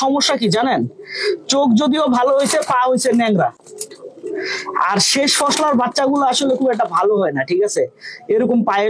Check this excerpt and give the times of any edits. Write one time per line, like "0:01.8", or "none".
none